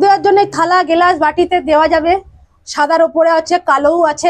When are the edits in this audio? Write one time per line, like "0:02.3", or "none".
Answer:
none